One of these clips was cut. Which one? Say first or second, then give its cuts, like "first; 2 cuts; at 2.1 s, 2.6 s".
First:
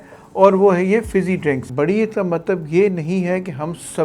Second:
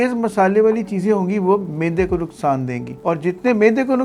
first; 1 cut; at 1.6 s